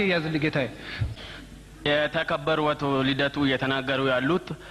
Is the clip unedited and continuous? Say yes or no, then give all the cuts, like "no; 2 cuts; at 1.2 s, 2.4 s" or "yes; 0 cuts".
no; 1 cut; at 1.0 s